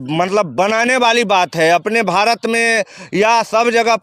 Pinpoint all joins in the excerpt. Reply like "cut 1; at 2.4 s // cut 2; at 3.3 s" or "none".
none